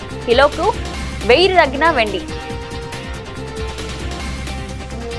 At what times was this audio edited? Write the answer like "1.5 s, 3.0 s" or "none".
2.2 s